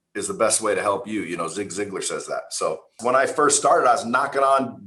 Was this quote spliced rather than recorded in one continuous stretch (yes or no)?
yes